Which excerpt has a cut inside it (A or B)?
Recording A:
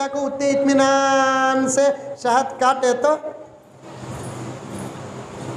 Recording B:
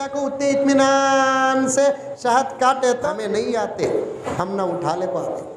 B